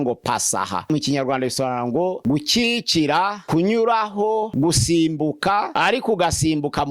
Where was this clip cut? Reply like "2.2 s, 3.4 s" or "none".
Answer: 0.8 s, 2.2 s, 3.4 s, 4.5 s, 5.7 s